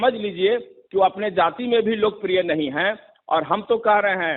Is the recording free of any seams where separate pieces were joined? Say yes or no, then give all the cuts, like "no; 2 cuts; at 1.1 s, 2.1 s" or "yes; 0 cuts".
yes; 0 cuts